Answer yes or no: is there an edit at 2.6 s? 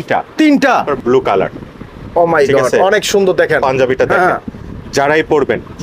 no